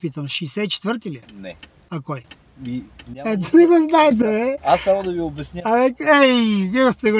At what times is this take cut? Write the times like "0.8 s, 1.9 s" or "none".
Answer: none